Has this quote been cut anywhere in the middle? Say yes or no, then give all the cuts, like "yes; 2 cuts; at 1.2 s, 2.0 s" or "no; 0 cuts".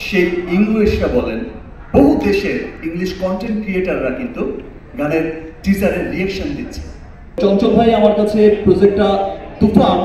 yes; 1 cut; at 7.4 s